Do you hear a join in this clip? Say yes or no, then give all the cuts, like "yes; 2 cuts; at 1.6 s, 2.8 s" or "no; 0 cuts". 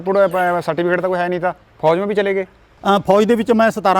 no; 0 cuts